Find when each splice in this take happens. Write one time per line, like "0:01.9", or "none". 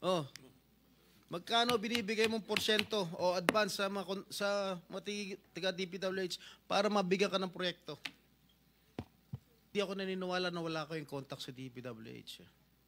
0:09.7